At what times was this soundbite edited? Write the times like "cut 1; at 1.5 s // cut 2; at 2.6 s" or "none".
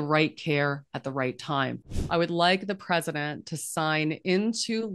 cut 1; at 1.9 s